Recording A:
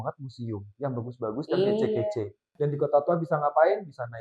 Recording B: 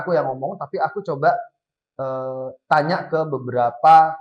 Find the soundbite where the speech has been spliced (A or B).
A